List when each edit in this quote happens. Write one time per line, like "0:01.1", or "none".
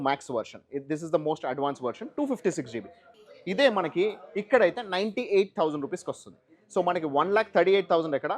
0:03.0